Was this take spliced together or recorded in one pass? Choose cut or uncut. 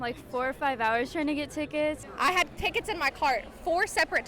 cut